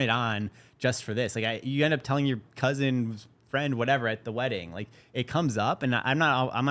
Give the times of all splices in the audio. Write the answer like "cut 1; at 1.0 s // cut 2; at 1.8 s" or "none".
none